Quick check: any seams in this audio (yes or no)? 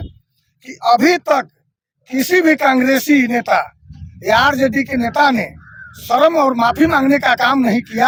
no